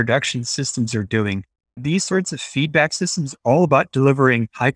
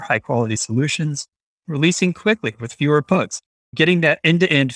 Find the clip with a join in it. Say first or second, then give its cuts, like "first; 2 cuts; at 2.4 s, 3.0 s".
first; 1 cut; at 1.8 s